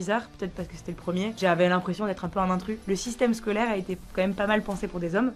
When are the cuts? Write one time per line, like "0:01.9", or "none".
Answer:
0:01.3
0:02.7